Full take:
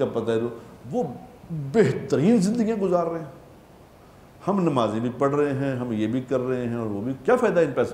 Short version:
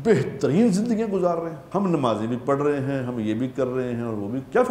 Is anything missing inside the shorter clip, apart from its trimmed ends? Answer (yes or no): yes